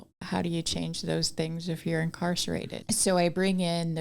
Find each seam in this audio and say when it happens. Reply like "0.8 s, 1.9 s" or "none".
2.7 s